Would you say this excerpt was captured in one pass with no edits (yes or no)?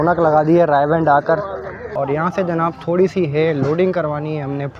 no